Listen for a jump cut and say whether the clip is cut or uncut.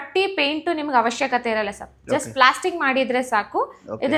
uncut